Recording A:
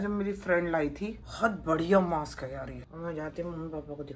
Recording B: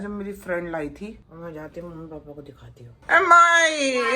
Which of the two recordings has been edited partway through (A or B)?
B